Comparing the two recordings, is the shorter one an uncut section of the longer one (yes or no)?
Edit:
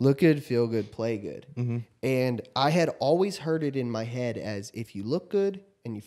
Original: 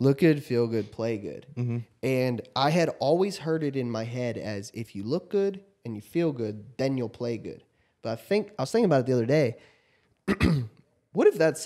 yes